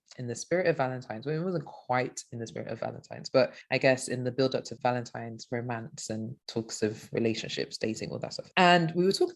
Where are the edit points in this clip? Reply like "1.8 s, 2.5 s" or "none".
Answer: 4.7 s, 8.5 s